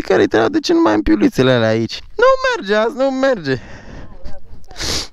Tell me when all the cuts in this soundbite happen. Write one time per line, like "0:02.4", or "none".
0:02.0

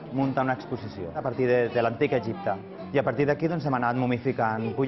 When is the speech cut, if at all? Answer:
0:01.2
0:02.7

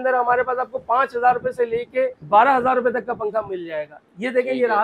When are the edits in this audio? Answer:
0:02.2

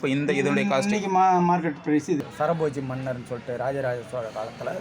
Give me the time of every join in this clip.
0:02.2

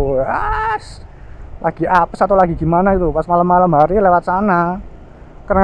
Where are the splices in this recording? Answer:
none

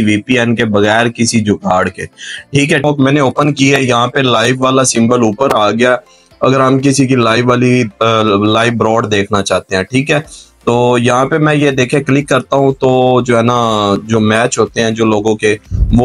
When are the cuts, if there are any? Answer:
0:02.8

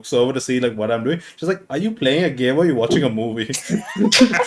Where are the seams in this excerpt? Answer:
none

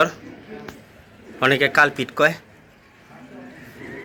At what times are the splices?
none

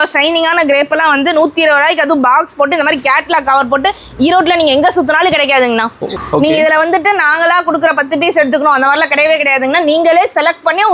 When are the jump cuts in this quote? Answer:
0:06.2

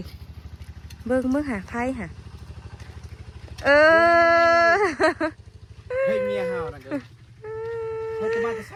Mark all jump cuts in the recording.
none

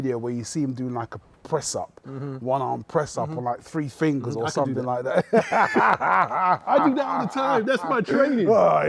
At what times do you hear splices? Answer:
none

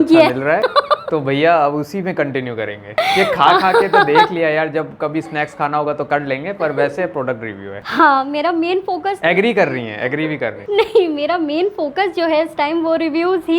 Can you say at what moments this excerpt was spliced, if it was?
none

